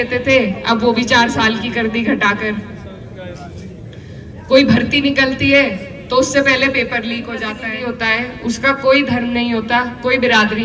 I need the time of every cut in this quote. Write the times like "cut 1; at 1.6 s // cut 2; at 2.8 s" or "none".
cut 1; at 7.6 s